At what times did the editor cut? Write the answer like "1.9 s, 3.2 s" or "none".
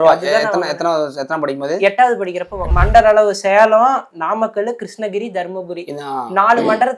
2.7 s